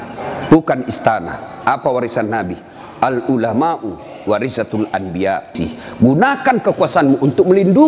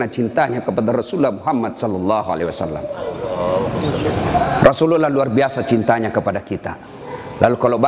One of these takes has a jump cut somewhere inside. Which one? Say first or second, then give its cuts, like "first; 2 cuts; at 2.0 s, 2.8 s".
first; 1 cut; at 5.6 s